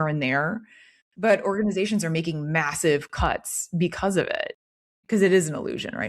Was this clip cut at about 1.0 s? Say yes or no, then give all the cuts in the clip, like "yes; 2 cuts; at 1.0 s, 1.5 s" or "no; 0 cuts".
no; 1 cut; at 4.9 s